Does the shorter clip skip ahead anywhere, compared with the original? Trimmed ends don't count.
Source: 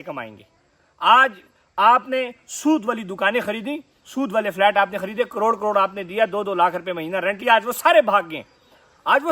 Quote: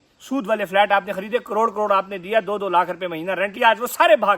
no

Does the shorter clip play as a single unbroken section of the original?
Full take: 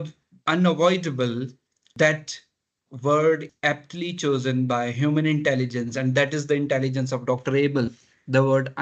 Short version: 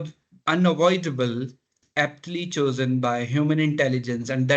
no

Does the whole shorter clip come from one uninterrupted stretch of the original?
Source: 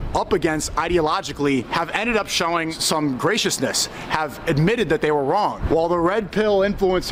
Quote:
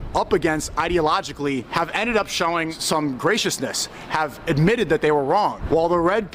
yes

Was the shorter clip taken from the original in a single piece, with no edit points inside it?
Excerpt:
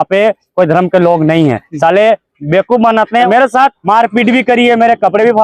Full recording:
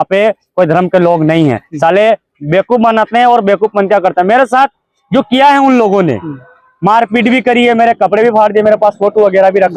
no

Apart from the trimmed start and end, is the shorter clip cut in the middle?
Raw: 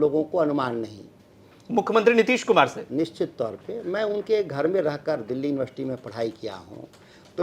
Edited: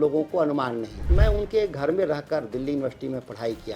yes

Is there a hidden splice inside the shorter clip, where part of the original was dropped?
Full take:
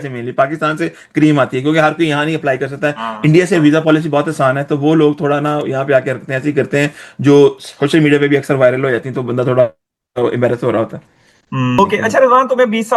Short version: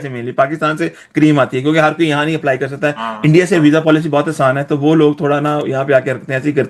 no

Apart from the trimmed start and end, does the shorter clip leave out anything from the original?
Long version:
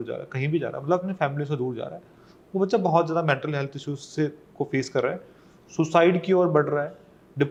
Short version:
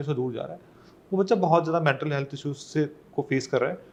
no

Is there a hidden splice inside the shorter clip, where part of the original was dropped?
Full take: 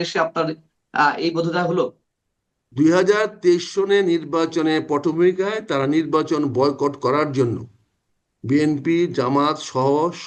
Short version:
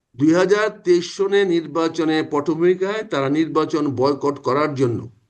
no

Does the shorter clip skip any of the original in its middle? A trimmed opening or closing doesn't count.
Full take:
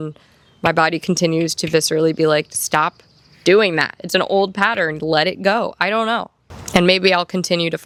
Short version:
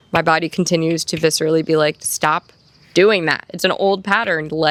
no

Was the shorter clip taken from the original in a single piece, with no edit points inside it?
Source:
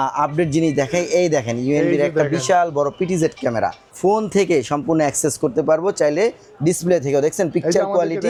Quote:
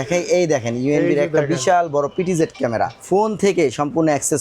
no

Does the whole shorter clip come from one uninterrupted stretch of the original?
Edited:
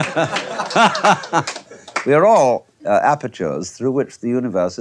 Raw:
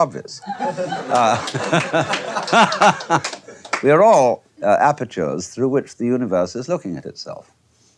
yes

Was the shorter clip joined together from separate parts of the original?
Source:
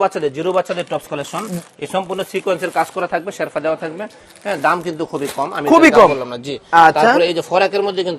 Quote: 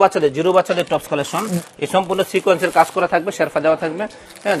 no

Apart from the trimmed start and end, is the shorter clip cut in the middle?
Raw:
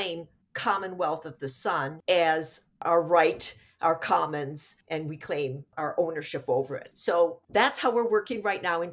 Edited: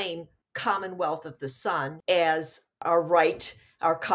no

